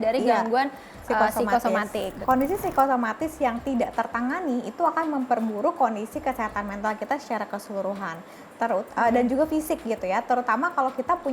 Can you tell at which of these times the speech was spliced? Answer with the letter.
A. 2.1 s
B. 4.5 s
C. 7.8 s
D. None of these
A